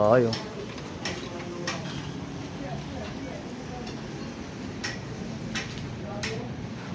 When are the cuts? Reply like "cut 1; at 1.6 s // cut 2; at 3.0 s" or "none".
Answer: none